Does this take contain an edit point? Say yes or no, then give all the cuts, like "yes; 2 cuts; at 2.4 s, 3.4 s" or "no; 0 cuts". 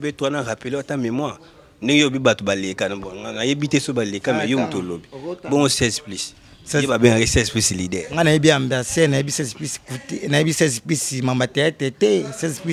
no; 0 cuts